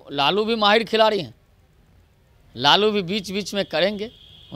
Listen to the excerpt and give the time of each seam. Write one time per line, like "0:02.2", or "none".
none